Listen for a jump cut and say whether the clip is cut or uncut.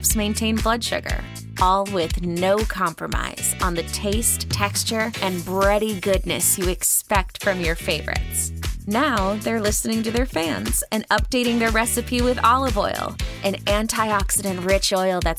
uncut